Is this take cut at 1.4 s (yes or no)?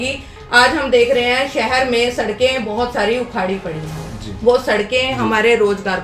no